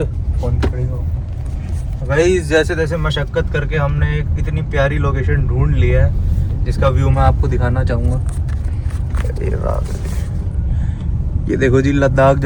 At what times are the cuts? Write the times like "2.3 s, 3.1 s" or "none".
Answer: none